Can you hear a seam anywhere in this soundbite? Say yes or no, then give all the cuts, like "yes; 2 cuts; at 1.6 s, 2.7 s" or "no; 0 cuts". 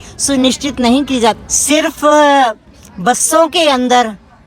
yes; 1 cut; at 1.4 s